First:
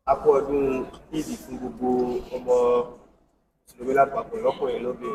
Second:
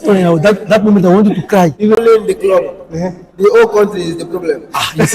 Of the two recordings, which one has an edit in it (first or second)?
second